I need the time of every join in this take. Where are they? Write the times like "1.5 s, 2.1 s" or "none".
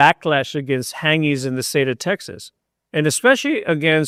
none